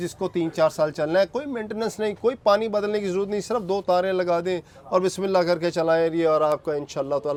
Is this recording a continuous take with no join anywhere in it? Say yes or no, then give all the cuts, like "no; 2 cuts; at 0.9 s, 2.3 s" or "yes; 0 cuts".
yes; 0 cuts